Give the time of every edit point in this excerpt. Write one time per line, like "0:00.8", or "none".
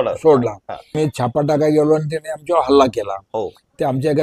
0:00.9